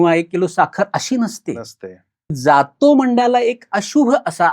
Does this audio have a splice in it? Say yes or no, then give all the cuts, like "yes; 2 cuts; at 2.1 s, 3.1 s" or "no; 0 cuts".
yes; 1 cut; at 2.3 s